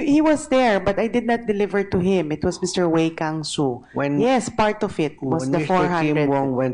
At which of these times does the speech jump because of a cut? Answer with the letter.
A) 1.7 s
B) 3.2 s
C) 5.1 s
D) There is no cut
B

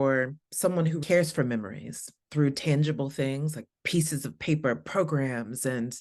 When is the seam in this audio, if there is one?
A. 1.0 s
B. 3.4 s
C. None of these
A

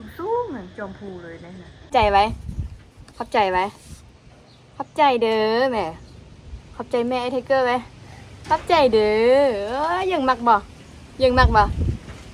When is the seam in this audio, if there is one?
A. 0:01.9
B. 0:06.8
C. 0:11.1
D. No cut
A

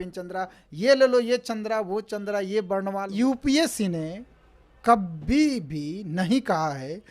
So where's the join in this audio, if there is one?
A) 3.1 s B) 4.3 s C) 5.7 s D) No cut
A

